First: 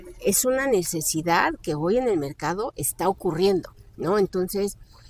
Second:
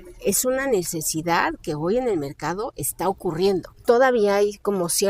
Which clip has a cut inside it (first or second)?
second